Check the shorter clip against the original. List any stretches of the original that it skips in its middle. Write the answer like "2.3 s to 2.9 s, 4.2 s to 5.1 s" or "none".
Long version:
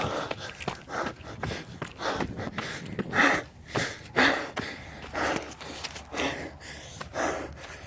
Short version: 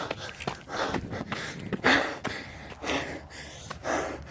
1.0 s to 2.0 s, 3.1 s to 4.1 s, 5.0 s to 6.0 s

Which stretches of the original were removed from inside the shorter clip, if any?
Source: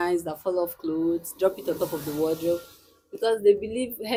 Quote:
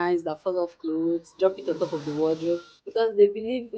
2.8 s to 3.0 s

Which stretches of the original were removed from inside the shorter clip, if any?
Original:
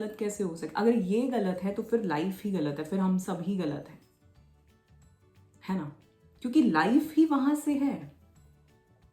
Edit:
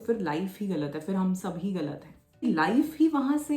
4.3 s to 6.6 s

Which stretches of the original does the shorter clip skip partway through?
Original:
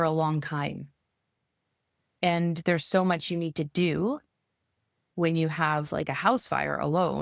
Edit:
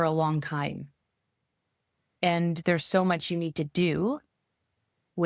none

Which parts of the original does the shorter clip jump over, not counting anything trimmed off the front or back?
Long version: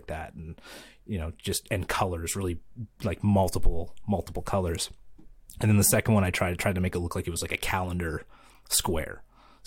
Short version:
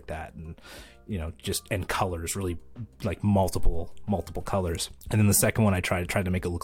4.9 s to 5.4 s

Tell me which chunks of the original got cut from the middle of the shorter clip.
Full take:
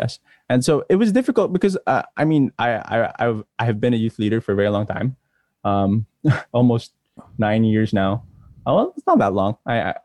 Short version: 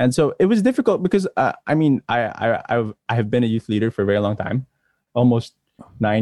5.5 s to 6.4 s

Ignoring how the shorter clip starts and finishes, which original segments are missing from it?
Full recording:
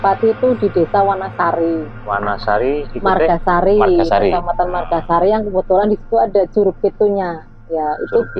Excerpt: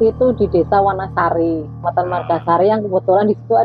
2.0 s to 4.4 s

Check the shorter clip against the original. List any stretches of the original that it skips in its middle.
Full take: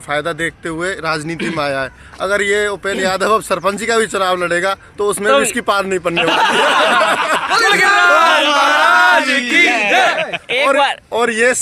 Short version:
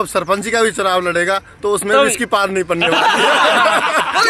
none

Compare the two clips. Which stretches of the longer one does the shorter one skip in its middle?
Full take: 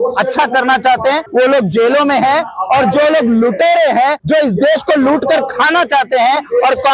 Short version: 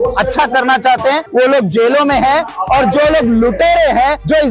none

